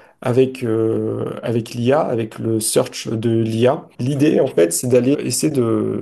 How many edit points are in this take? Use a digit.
2